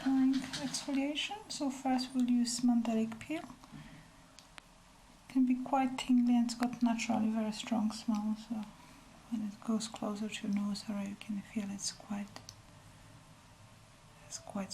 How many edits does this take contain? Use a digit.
0